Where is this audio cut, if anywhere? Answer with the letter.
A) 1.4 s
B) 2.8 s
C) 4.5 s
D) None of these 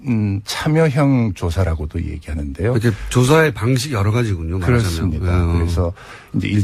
B